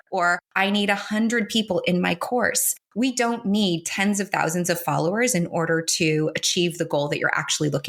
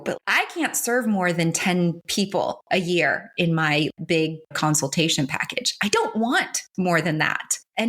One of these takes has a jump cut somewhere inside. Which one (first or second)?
second